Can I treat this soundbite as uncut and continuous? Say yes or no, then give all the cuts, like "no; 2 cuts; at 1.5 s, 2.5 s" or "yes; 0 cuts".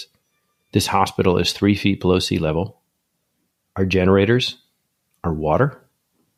yes; 0 cuts